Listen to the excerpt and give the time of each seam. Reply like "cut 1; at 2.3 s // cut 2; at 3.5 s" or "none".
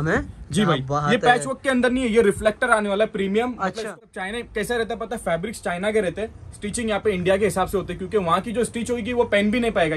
cut 1; at 3.9 s